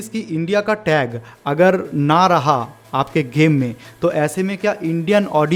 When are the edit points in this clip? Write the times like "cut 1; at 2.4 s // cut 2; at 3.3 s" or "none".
none